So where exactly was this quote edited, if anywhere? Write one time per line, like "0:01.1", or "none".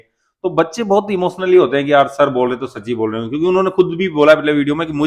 none